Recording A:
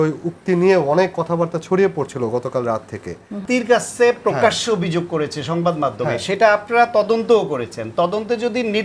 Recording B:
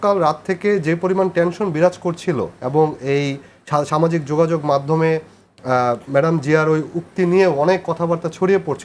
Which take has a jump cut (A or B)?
A